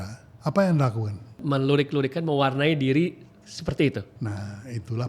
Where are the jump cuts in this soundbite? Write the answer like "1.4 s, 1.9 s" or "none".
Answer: 1.4 s, 4.1 s